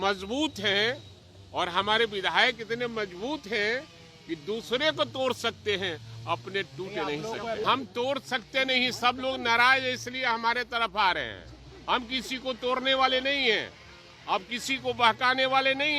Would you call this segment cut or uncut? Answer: cut